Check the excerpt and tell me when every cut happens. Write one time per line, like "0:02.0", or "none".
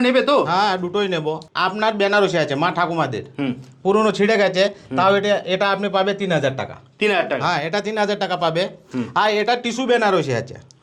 0:01.5